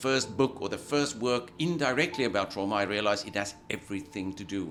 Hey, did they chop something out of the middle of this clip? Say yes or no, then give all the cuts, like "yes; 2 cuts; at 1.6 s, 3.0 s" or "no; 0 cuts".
no; 0 cuts